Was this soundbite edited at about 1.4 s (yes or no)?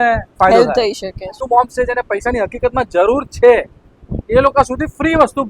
yes